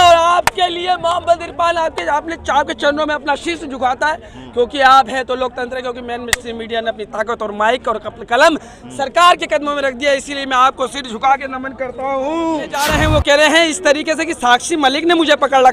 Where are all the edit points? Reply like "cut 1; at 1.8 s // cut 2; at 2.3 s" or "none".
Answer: cut 1; at 13.0 s

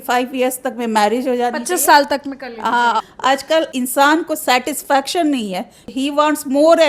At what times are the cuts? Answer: cut 1; at 3.0 s // cut 2; at 5.9 s

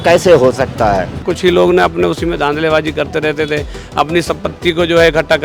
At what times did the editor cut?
cut 1; at 1.3 s

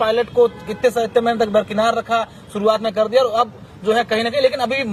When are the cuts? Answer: none

